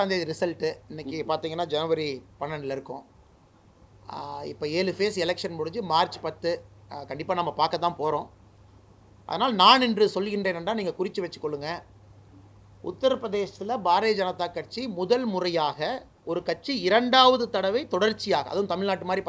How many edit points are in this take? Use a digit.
0